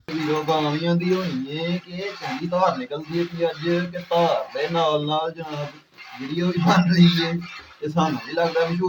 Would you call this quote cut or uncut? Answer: uncut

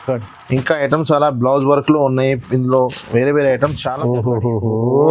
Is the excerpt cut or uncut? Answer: cut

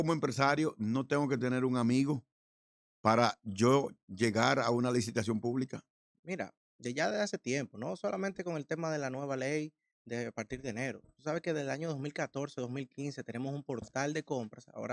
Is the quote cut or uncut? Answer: uncut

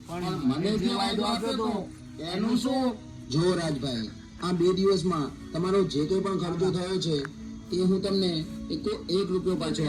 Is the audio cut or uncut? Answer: uncut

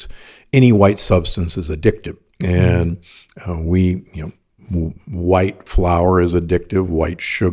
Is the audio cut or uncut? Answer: uncut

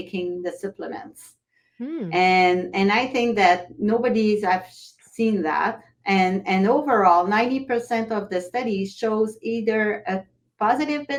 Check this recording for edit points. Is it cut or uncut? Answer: uncut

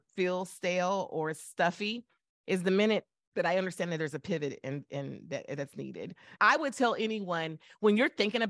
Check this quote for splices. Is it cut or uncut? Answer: uncut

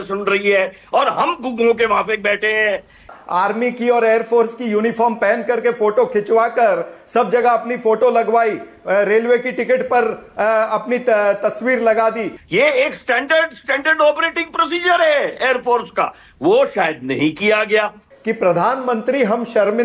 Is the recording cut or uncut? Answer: cut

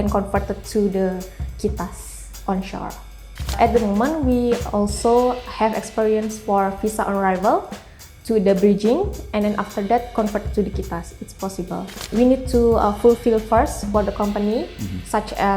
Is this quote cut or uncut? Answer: cut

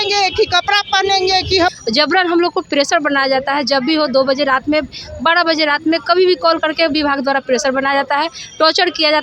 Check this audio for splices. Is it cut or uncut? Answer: cut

